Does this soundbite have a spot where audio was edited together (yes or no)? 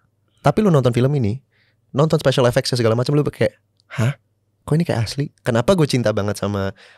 yes